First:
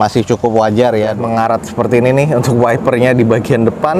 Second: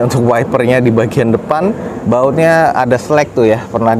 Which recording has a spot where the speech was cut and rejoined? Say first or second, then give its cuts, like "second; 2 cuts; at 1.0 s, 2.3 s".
first; 1 cut; at 1.2 s